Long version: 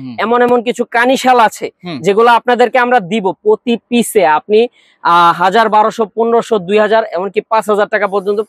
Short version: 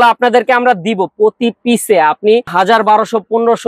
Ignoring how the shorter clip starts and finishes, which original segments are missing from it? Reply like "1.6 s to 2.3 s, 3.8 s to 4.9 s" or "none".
4.8 s to 5.4 s